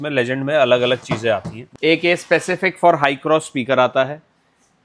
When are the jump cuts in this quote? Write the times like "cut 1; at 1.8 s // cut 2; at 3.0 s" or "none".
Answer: cut 1; at 1.6 s